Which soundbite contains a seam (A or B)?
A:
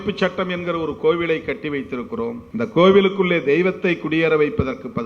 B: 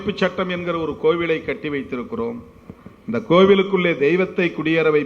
A